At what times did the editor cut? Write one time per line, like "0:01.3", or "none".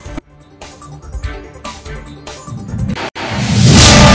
0:03.1